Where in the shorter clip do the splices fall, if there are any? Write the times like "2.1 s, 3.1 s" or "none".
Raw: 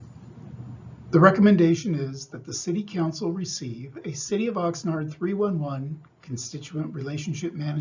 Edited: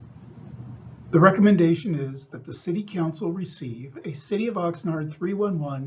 none